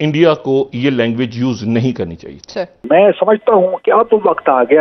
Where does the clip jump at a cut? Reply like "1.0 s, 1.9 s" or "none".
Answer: 2.9 s